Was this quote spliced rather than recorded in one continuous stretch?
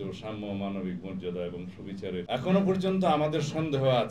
yes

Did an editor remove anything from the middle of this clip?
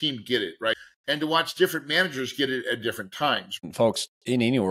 yes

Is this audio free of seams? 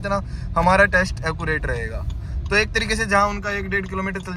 yes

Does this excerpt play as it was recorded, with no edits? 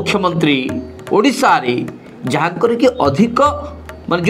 yes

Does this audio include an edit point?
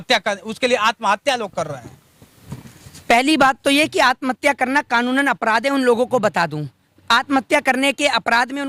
no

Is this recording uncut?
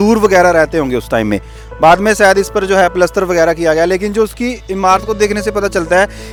yes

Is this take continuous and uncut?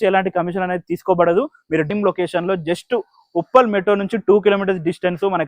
no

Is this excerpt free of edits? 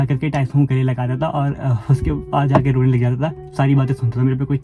no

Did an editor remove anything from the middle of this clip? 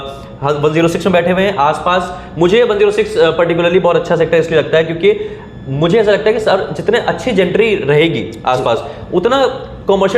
no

